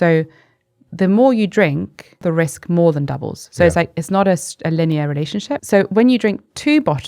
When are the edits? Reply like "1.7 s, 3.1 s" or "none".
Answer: 2.2 s, 5.5 s